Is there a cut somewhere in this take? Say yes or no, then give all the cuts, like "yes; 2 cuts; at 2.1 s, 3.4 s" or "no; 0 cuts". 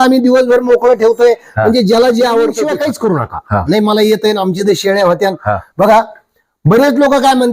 yes; 1 cut; at 2.6 s